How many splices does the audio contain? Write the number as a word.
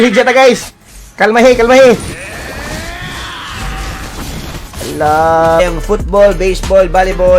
one